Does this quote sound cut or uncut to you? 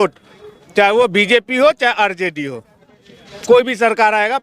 uncut